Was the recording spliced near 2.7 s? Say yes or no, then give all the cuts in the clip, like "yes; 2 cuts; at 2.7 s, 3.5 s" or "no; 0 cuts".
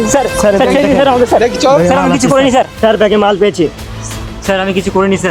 yes; 1 cut; at 2.7 s